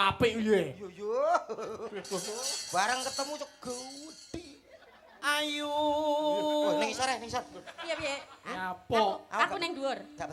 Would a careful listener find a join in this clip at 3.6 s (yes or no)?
no